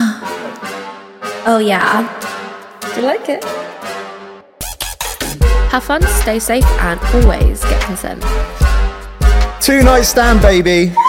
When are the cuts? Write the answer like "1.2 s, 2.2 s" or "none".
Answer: none